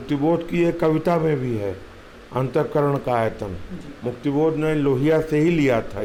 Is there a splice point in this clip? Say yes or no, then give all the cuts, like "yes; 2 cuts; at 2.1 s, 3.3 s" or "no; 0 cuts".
no; 0 cuts